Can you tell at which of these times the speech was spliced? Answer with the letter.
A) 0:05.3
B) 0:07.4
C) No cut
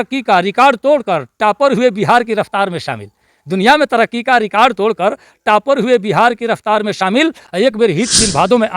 B